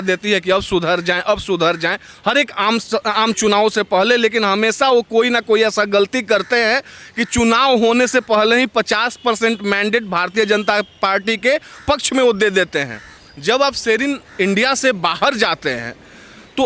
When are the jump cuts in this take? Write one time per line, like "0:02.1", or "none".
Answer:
none